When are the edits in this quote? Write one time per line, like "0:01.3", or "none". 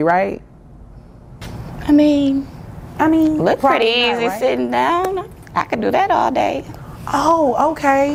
none